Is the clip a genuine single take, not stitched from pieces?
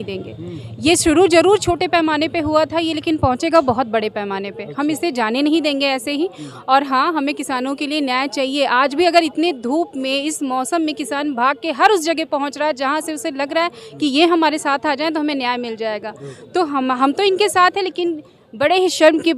yes; 0 cuts

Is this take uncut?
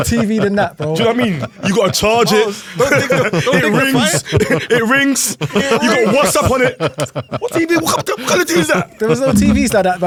yes; 0 cuts

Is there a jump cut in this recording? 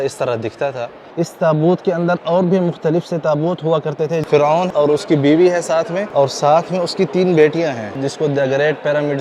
yes; 4 cuts; at 1.0 s, 4.7 s, 6.0 s, 8.0 s

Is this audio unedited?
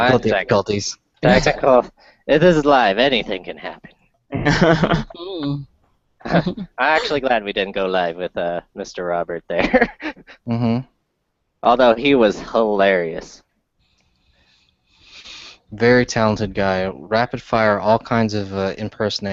yes; 0 cuts

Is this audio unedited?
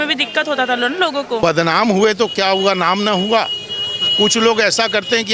no; 1 cut; at 1.4 s

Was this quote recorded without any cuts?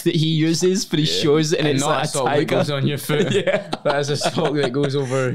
yes; 0 cuts

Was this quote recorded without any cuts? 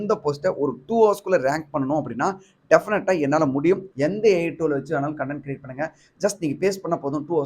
no; 1 cut; at 3.9 s

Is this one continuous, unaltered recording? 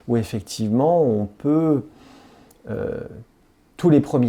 yes; 0 cuts

